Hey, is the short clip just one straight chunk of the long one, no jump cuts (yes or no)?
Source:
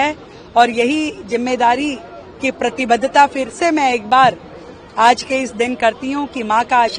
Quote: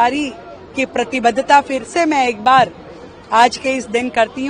yes